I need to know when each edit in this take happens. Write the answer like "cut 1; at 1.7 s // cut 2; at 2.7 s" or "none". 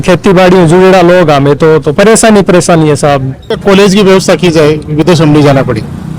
cut 1; at 3.6 s